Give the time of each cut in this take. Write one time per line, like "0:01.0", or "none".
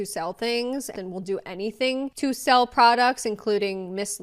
0:00.9